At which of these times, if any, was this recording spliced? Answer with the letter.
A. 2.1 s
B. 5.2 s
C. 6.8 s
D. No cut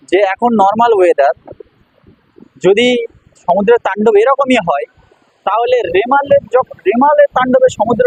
D